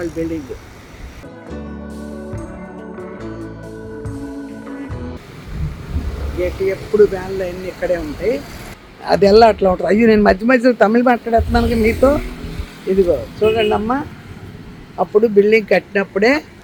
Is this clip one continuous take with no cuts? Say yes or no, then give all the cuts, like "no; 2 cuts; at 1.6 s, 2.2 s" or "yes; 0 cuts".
yes; 0 cuts